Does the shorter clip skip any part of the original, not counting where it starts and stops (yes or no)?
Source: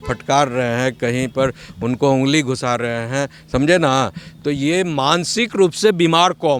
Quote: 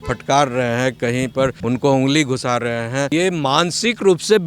yes